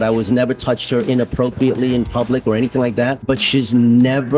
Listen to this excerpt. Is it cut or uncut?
cut